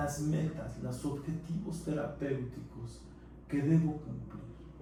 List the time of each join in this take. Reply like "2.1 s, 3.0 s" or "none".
none

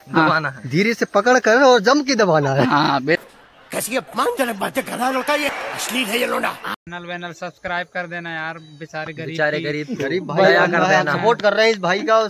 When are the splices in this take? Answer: 6.8 s

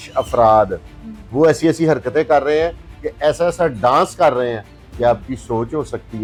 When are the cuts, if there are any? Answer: none

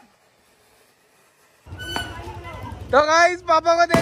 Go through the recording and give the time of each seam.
1.8 s

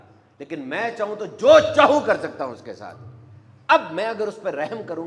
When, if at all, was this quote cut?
none

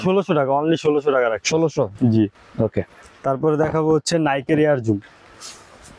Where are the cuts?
none

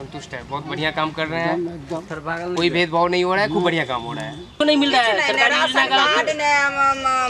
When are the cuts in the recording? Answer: 4.6 s

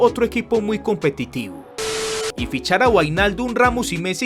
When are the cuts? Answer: 2.1 s

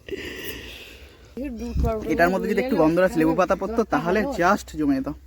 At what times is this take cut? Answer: 1.4 s

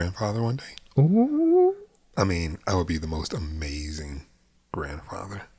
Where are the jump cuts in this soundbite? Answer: 1.9 s

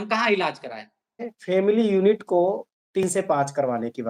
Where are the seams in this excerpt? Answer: 1.3 s

